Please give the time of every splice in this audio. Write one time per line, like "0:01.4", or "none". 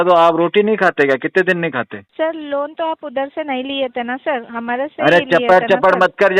0:02.0